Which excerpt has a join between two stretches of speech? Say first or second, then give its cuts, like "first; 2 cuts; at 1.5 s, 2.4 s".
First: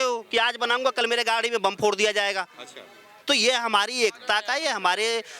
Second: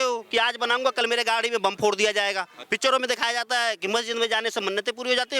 second; 1 cut; at 2.6 s